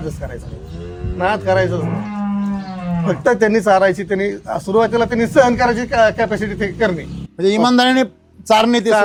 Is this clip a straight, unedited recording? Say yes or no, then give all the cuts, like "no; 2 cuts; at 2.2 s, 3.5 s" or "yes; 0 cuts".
yes; 0 cuts